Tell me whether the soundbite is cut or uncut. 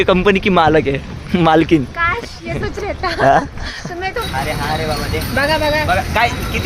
cut